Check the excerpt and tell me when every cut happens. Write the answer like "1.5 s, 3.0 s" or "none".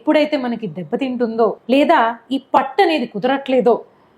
1.6 s